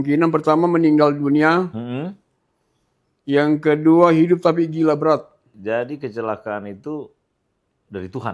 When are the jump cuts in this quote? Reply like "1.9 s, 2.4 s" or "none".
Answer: 5.5 s